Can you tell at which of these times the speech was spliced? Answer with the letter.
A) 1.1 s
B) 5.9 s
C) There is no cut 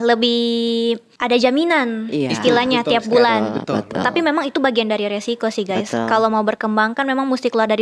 A